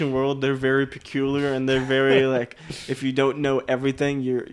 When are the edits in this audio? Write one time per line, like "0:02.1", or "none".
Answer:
none